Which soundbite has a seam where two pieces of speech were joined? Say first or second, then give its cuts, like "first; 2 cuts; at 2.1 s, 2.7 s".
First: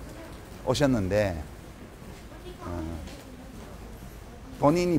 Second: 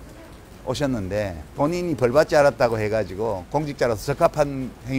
second; 1 cut; at 1.4 s